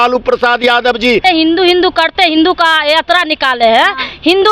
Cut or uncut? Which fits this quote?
cut